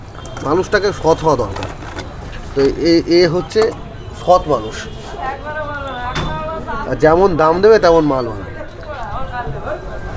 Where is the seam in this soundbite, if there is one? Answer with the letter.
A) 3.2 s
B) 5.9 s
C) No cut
C